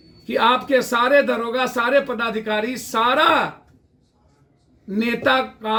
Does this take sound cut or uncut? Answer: uncut